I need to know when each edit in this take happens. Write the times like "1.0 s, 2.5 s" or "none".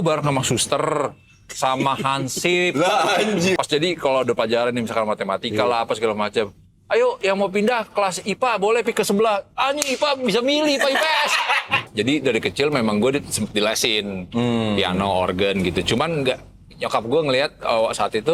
3.6 s, 11.7 s